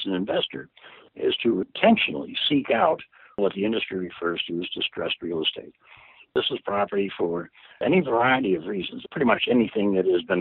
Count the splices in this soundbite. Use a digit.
2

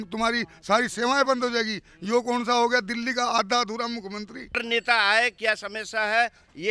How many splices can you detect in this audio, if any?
1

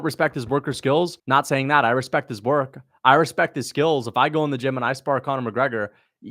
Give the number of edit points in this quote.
1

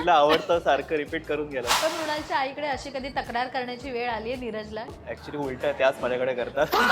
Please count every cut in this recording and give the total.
2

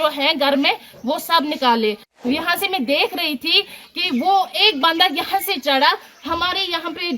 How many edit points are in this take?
1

